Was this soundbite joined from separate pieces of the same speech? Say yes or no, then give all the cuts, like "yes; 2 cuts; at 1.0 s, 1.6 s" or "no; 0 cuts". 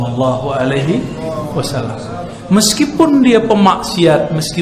no; 0 cuts